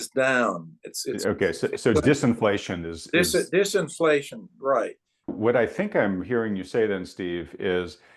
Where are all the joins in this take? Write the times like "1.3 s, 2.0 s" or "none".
5.3 s